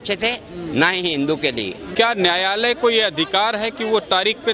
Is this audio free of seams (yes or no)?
no